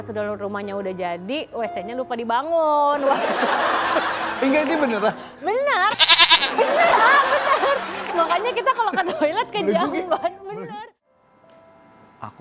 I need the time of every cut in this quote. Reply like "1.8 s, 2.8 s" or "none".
10.7 s